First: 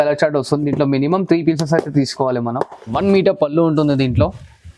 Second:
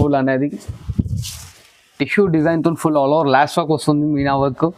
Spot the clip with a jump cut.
first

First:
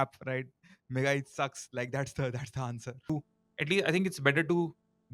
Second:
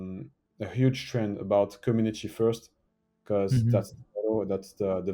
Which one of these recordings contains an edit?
first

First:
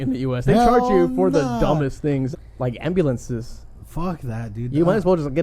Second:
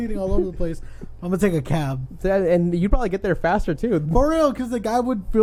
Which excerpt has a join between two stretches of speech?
first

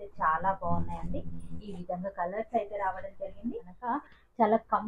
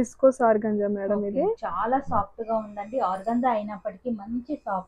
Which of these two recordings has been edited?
first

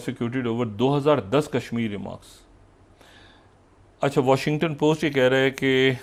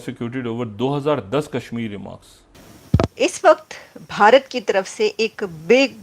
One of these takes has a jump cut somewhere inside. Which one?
second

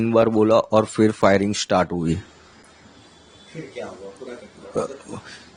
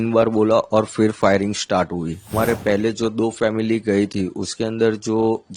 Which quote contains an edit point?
second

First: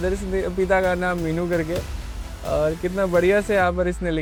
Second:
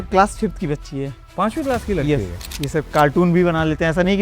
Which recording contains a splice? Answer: second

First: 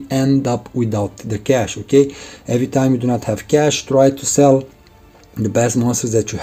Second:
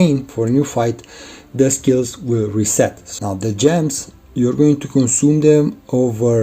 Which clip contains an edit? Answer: second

